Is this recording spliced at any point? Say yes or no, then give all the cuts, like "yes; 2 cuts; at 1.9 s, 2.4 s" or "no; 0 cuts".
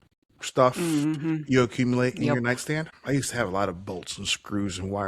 yes; 1 cut; at 2.9 s